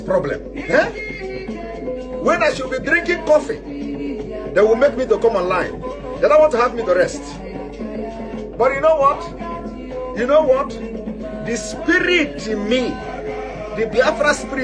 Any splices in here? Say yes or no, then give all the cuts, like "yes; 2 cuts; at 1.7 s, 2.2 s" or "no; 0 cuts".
no; 0 cuts